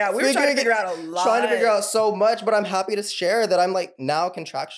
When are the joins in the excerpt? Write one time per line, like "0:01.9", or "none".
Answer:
none